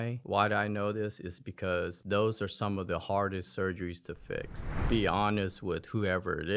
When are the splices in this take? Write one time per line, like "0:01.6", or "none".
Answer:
0:04.8